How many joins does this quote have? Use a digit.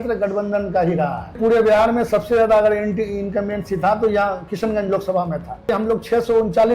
2